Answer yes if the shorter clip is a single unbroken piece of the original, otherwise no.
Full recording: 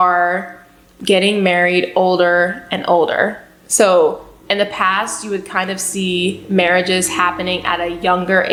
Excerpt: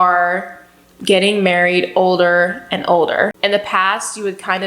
no